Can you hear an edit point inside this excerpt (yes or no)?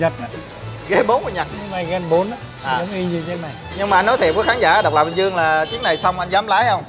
no